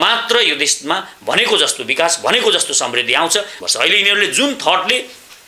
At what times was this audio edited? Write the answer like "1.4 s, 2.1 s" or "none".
3.6 s